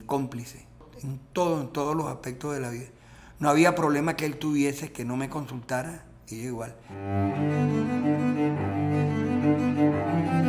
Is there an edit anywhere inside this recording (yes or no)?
yes